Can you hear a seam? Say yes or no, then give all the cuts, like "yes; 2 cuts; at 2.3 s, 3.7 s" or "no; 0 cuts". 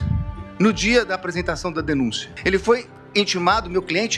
yes; 1 cut; at 2.3 s